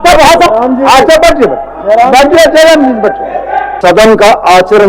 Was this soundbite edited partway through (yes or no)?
yes